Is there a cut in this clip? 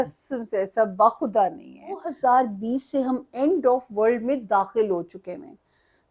yes; 1 cut; at 1.6 s

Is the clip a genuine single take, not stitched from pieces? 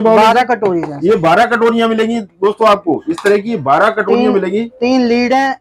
yes; 0 cuts

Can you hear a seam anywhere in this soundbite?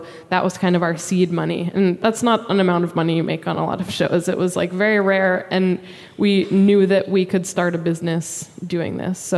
yes; 1 cut; at 2.0 s

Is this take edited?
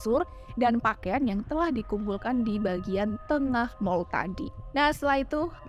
no; 0 cuts

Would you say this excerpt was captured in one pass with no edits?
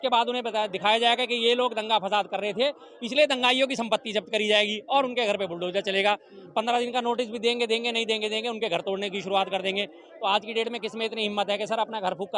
yes; 0 cuts

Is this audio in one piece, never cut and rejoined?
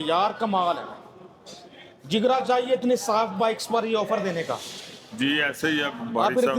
yes; 0 cuts

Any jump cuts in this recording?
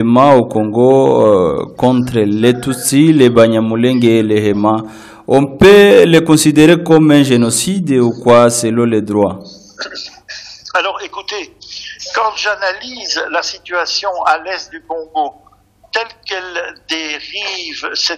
no; 0 cuts

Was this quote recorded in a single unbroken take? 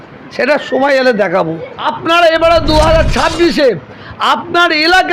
no; 1 cut; at 1.6 s

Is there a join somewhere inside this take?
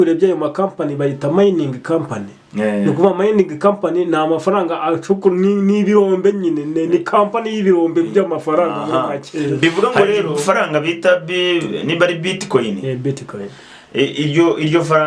yes; 1 cut; at 10.4 s

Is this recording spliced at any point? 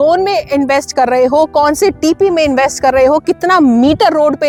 no; 0 cuts

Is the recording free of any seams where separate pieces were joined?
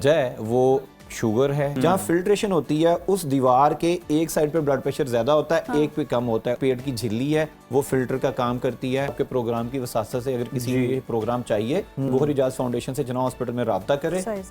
no; 4 cuts; at 1.8 s, 6.6 s, 9.1 s, 12.1 s

